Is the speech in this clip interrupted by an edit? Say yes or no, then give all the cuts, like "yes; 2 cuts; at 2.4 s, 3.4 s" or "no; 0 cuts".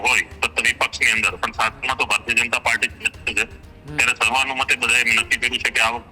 no; 0 cuts